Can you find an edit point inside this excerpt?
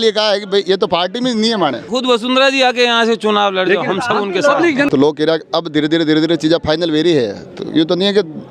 yes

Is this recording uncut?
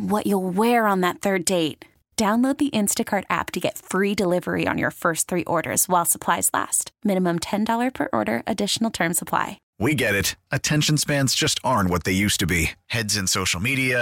no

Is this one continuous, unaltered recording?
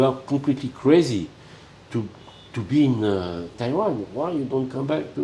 no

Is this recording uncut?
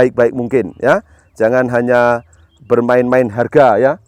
yes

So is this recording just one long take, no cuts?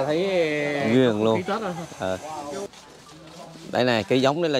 no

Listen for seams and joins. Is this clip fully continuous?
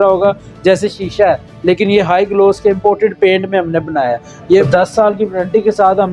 no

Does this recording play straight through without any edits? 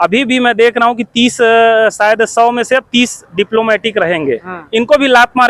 yes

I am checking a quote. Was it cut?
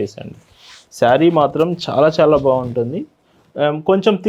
no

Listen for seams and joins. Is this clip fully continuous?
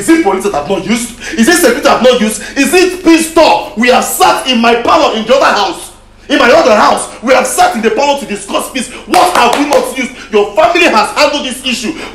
yes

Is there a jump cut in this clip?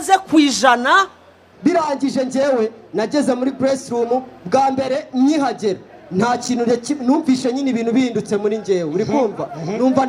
yes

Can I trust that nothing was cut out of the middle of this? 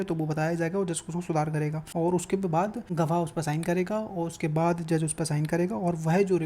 no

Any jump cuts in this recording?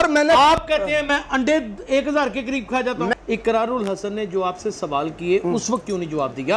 yes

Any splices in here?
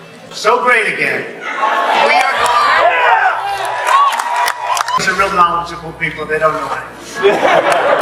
yes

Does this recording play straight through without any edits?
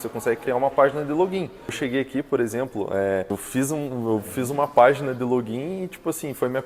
no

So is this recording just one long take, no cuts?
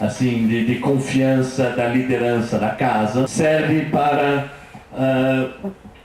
no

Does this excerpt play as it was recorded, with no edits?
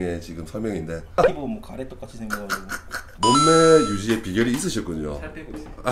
no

